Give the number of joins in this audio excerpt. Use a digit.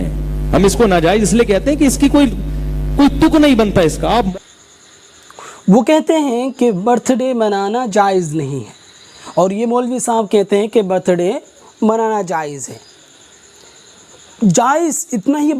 0